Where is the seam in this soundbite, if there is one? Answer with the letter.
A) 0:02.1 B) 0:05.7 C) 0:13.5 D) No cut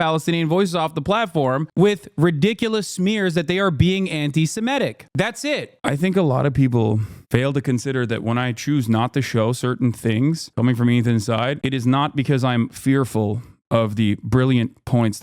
B